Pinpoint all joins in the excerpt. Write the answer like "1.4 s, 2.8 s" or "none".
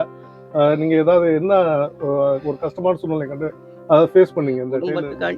4.4 s